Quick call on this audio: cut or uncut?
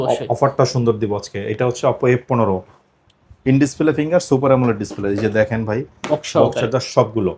uncut